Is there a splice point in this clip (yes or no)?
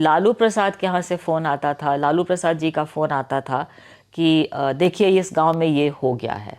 no